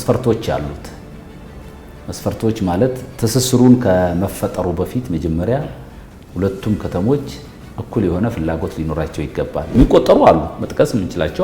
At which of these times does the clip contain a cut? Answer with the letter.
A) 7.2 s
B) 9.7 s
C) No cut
B